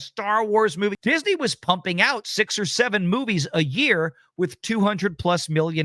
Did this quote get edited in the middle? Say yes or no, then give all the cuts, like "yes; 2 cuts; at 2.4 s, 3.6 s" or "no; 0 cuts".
yes; 1 cut; at 1.0 s